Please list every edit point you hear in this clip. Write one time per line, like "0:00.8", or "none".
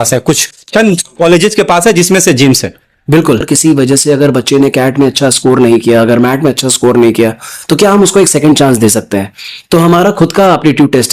0:03.5